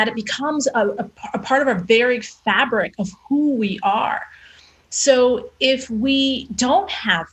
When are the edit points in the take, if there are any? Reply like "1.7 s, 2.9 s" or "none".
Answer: 1.1 s